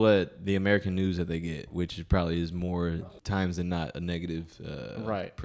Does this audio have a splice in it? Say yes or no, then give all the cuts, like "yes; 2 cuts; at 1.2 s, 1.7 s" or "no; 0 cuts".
yes; 1 cut; at 3.0 s